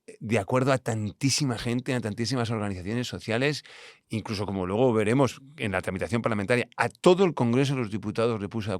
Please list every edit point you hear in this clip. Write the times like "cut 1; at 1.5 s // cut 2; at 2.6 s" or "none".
none